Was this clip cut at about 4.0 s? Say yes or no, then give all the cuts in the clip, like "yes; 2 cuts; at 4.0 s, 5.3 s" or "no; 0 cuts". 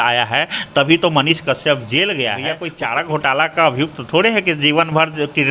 no; 1 cut; at 2.6 s